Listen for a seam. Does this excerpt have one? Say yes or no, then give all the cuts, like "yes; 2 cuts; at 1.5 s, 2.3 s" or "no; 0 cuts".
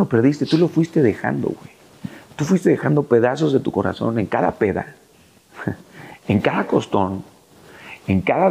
no; 0 cuts